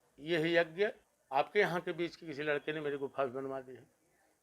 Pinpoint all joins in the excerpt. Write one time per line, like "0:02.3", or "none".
0:01.1